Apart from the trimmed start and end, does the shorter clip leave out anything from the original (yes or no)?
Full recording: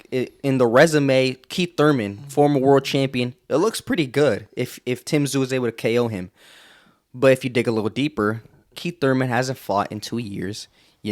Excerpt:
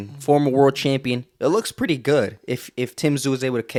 no